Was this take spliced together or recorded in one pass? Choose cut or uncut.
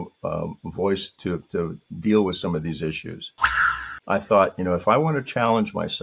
cut